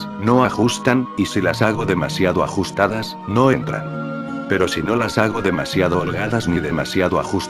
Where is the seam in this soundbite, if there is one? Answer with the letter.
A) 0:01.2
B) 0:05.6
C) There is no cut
B